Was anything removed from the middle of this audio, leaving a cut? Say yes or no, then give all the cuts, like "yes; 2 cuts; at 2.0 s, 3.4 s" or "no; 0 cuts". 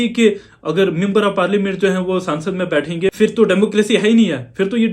yes; 1 cut; at 3.1 s